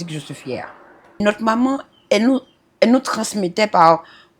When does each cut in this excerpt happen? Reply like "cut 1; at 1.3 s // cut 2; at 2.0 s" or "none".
cut 1; at 1.2 s